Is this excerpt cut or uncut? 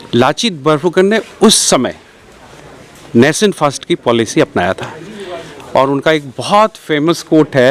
uncut